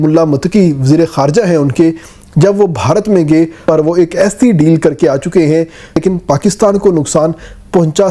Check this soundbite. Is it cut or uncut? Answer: cut